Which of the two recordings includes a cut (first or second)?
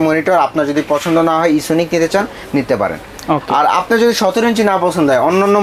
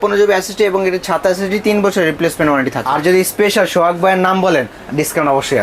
second